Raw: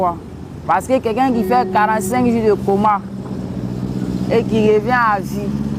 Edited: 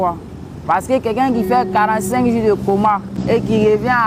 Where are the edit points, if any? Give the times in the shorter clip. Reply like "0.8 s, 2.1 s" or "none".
3.1 s